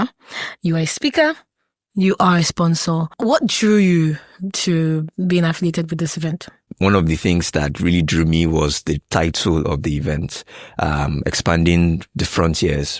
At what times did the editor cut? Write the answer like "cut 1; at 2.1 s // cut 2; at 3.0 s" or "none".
cut 1; at 3.1 s // cut 2; at 6.6 s